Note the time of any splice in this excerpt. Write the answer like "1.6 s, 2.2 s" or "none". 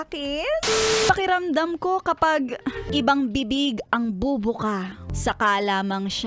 1.0 s, 2.9 s, 5.0 s